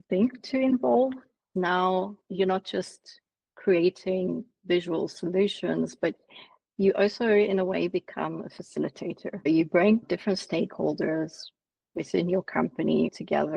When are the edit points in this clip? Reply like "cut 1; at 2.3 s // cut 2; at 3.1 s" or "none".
cut 1; at 1.5 s // cut 2; at 2.2 s